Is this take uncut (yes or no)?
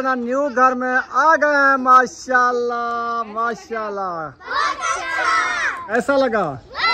yes